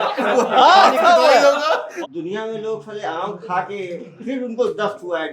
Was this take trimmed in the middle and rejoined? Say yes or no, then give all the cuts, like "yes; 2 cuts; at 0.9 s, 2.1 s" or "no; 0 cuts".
yes; 1 cut; at 1.9 s